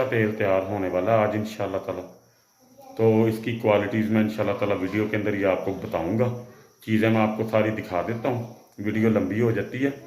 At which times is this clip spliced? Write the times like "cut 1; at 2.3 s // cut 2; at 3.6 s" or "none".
none